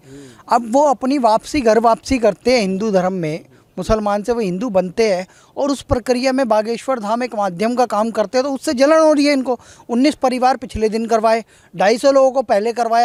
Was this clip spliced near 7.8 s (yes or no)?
no